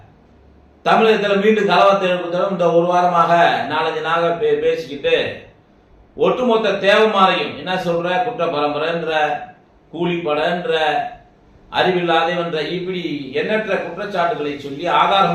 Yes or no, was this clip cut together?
no